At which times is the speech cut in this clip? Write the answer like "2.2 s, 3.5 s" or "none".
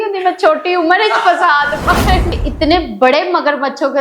2.3 s